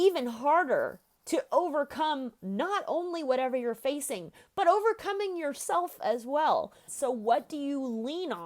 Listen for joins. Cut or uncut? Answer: cut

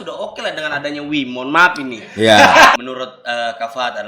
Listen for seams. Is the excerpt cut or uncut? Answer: cut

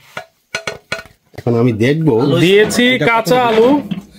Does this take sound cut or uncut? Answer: uncut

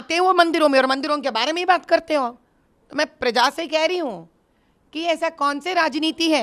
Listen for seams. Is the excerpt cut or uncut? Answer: uncut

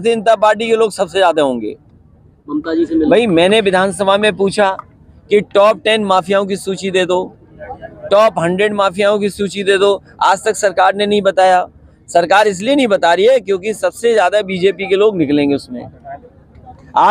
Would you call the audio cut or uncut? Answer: uncut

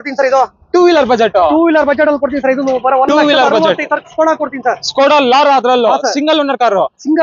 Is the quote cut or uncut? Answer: uncut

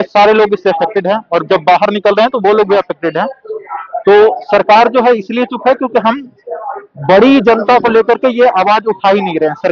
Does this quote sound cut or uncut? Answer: uncut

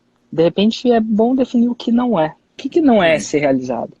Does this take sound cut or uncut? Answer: cut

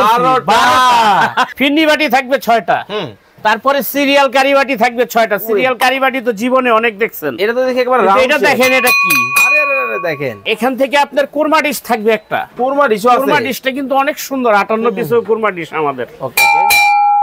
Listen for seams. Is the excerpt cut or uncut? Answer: cut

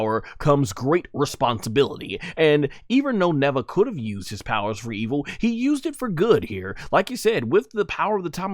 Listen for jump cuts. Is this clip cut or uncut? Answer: uncut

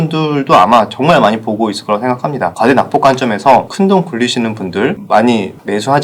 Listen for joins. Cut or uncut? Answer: cut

